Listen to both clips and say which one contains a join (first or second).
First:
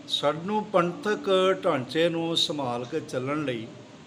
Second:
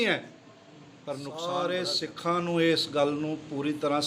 second